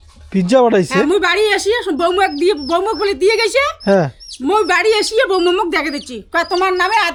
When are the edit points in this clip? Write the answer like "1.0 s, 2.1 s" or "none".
none